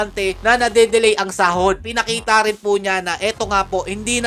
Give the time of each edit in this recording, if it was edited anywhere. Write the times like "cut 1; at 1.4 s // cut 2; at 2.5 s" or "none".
cut 1; at 1.8 s